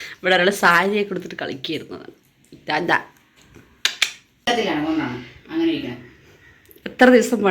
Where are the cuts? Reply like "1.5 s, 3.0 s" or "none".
4.5 s